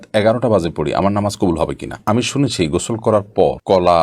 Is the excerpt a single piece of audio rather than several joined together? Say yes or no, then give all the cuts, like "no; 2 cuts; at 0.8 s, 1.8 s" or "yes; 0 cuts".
no; 1 cut; at 2.0 s